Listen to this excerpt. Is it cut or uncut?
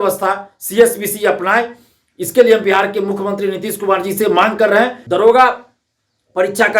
cut